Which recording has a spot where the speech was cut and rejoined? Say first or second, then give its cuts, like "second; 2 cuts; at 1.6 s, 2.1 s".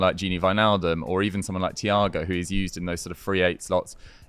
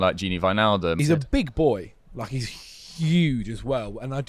second; 1 cut; at 1.0 s